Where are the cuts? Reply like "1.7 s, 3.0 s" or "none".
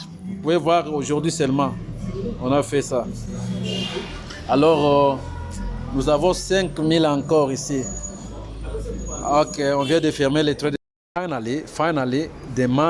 10.7 s